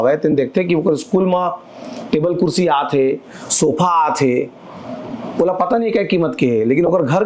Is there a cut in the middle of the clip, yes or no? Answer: no